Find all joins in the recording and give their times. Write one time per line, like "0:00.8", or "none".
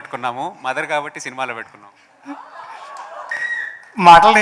0:03.3